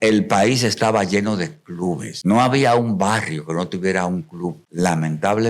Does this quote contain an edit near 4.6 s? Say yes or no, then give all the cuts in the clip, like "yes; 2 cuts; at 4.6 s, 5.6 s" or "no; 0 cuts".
yes; 2 cuts; at 2.1 s, 4.6 s